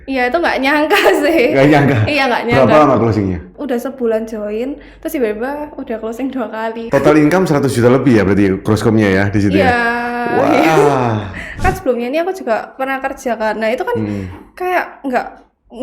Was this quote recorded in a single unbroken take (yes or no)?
no